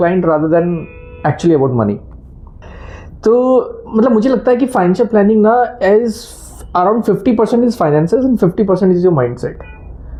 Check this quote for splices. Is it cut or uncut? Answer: uncut